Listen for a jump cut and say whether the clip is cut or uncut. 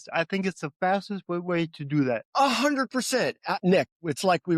cut